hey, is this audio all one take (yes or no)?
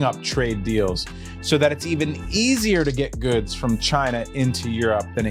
yes